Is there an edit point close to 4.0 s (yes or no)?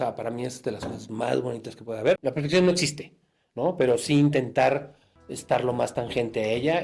no